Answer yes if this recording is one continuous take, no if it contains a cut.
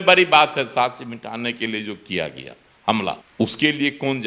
no